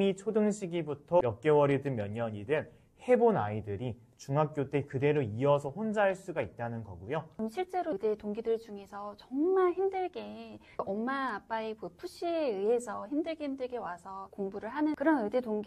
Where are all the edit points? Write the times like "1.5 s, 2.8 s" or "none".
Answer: 1.2 s, 7.3 s, 14.9 s